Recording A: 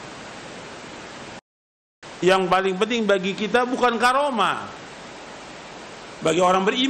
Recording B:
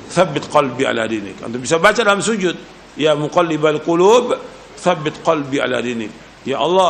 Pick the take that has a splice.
A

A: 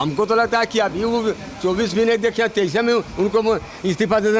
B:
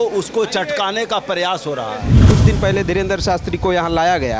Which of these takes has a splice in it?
B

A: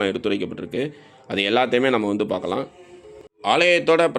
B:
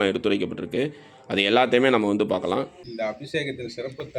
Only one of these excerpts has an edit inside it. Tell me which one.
B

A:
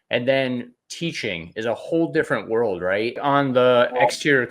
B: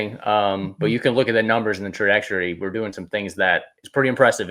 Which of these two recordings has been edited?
A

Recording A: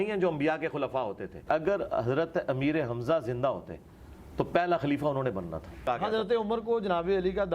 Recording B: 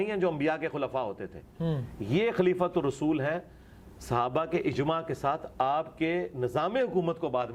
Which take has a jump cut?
A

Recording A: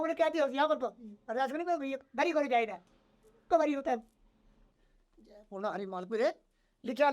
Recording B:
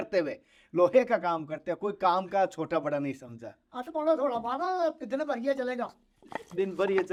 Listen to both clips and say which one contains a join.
A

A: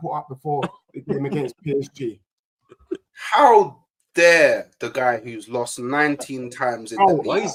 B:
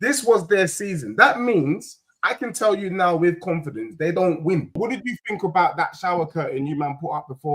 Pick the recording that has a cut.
B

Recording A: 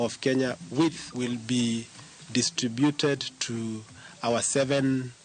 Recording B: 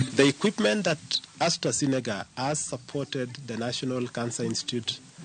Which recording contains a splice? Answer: A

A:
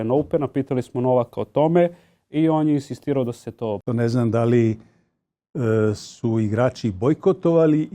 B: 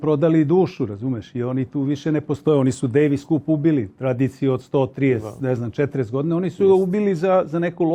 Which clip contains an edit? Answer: A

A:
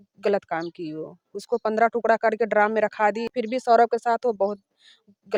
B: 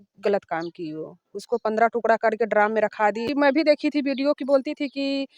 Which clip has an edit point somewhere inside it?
B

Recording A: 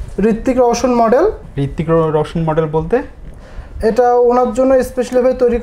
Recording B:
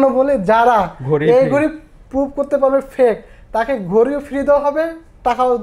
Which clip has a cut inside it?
A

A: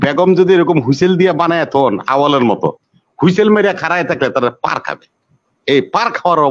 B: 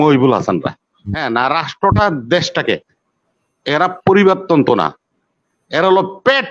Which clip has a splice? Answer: B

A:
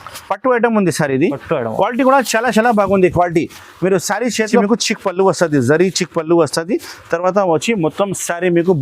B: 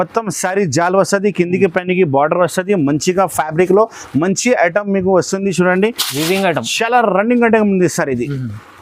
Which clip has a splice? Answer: A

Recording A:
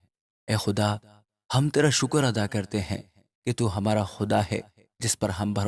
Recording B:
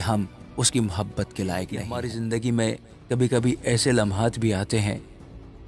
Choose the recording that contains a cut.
B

